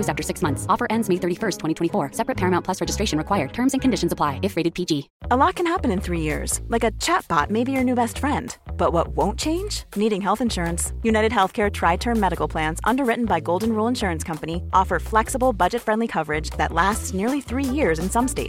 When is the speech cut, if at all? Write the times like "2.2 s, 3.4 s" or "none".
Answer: 5.1 s